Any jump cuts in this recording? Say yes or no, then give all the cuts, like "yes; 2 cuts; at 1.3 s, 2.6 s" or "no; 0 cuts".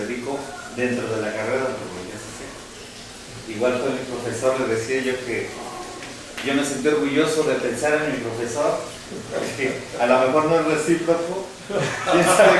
yes; 1 cut; at 6.0 s